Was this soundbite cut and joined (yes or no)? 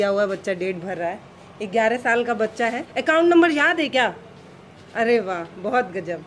yes